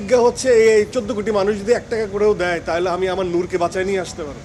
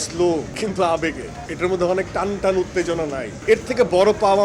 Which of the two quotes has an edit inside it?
second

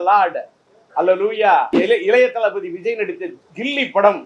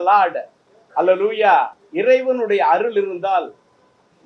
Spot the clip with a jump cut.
first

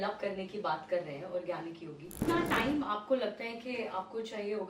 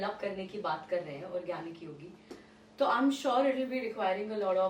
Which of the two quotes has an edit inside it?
first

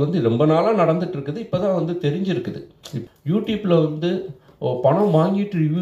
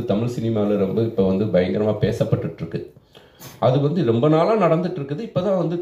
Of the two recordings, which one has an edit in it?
first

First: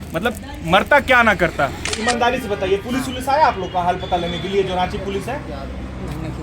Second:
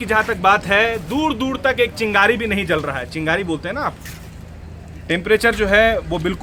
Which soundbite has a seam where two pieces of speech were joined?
first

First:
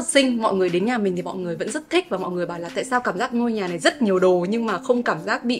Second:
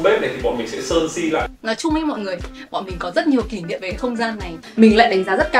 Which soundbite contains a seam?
second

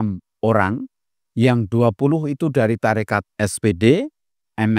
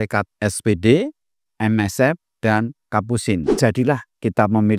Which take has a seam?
second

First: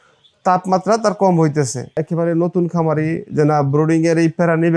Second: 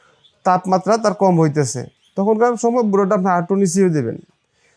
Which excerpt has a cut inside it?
first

